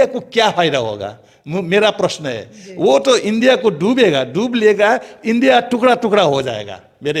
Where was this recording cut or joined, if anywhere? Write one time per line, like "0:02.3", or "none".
none